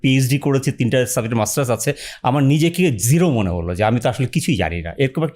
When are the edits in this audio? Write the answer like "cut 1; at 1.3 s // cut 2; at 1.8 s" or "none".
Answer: none